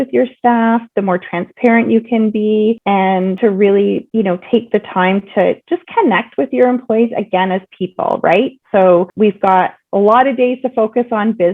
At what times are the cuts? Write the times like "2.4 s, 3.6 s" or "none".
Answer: 3.2 s, 4.1 s